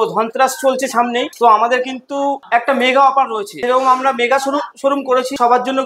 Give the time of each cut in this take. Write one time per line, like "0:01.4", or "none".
none